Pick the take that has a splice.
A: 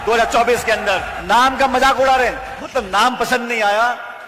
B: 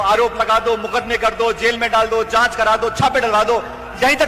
A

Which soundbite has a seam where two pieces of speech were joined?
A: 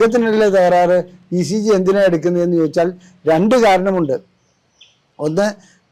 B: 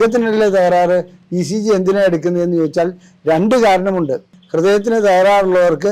B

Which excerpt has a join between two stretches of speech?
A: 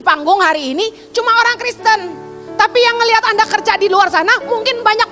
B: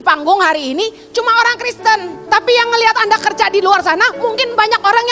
B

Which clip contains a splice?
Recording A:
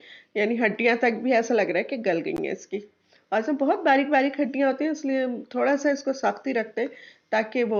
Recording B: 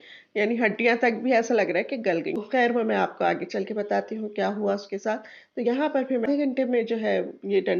B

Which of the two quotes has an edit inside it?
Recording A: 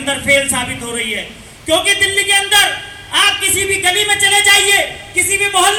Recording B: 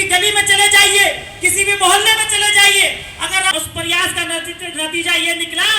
B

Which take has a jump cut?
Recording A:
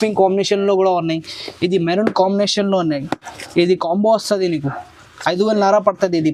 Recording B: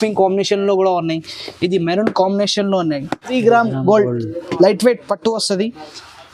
B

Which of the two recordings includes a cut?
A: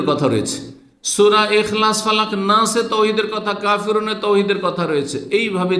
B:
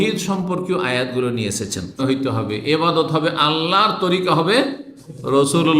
B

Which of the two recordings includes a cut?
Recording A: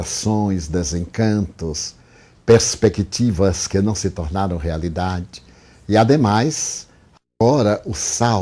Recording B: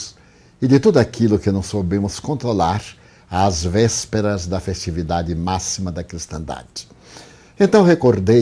A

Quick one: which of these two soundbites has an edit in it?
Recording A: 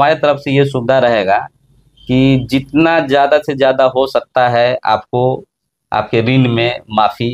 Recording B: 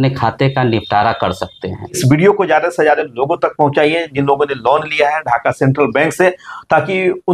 B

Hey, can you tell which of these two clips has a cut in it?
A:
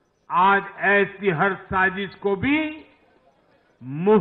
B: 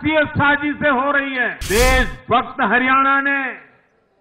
B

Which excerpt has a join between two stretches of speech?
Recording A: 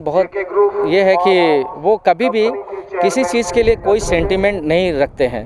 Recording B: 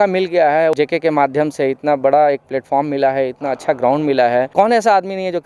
B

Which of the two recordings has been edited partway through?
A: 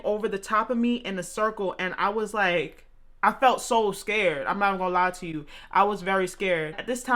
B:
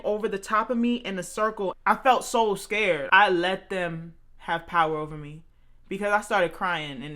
B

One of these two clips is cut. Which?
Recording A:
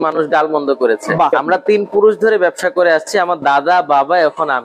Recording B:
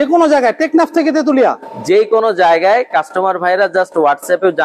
A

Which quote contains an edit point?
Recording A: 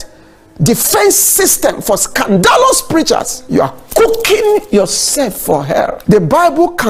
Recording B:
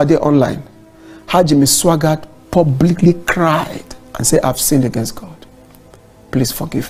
A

